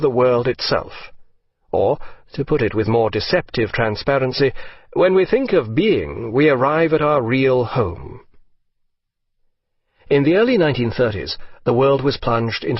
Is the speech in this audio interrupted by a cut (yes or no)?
yes